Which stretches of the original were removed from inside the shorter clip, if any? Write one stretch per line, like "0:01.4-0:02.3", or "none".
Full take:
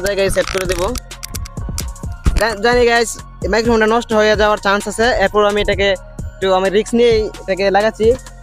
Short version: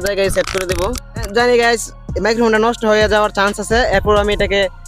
0:01.3-0:02.5